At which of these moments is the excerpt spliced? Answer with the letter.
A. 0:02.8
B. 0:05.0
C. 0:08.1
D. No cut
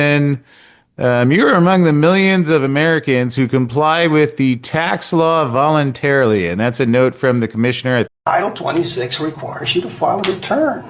C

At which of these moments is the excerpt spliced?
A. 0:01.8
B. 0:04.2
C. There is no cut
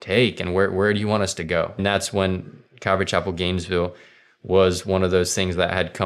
A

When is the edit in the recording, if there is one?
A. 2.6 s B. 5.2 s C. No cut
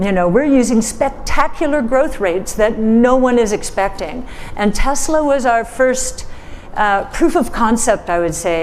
C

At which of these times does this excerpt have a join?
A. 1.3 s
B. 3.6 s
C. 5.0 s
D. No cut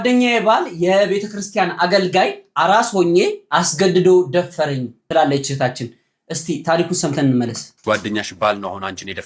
D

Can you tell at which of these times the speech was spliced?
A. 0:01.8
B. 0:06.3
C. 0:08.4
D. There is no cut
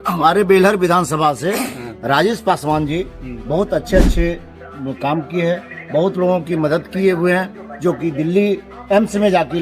D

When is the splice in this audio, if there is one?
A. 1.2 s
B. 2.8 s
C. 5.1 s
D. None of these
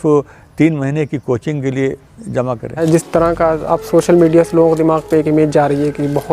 B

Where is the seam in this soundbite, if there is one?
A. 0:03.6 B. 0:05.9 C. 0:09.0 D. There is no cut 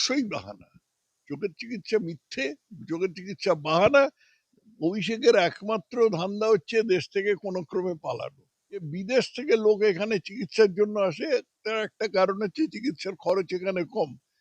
C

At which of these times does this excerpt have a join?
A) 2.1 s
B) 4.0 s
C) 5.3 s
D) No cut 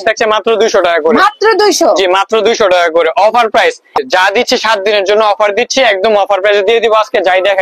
B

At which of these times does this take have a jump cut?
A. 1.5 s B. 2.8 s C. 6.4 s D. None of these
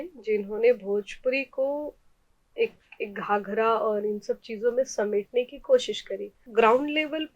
C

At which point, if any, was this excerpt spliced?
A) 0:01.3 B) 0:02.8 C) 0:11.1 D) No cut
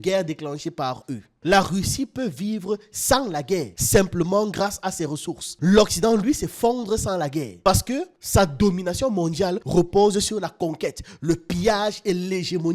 A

